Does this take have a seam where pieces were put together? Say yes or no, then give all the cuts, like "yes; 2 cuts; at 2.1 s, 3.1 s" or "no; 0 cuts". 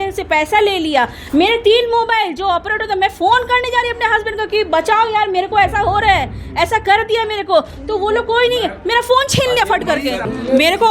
no; 0 cuts